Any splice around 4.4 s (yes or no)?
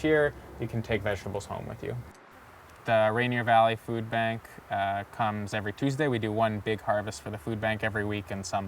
no